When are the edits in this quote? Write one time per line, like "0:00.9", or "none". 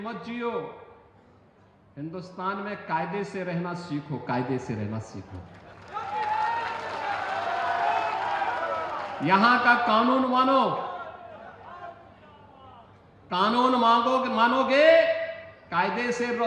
none